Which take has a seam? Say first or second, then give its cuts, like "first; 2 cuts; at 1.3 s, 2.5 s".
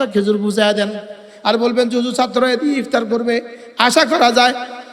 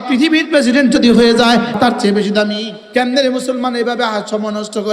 second; 2 cuts; at 1.8 s, 2.8 s